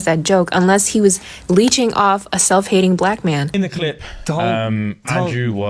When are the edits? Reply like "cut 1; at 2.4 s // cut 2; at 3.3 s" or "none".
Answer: cut 1; at 3.5 s